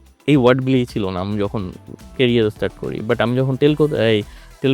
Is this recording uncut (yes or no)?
yes